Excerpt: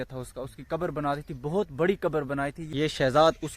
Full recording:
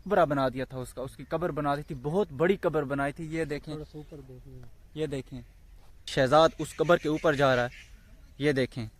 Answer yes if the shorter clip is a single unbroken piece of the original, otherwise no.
no